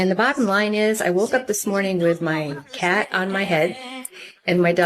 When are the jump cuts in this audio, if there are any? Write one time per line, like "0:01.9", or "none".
none